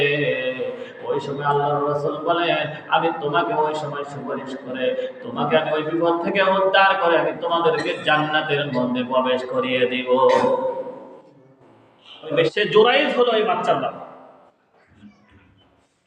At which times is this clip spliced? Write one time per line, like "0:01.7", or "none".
0:12.4